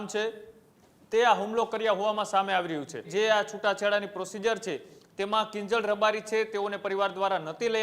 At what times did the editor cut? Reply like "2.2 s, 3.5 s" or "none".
3.1 s